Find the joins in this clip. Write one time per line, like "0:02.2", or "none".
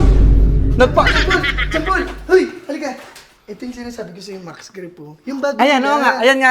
none